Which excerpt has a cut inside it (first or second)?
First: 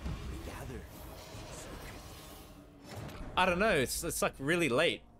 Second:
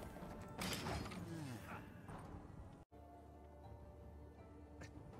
second